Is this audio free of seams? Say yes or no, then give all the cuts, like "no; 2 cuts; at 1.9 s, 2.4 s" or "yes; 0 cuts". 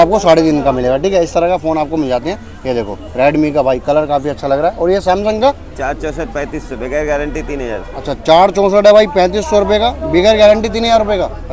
yes; 0 cuts